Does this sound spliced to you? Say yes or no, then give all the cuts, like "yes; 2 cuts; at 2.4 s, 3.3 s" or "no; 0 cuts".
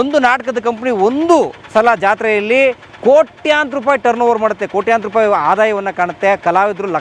no; 0 cuts